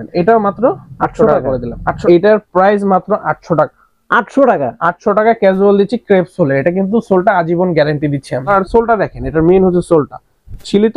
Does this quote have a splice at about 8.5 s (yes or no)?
yes